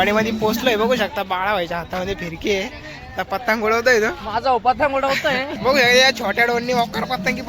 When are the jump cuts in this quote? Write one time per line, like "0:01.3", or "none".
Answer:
0:05.5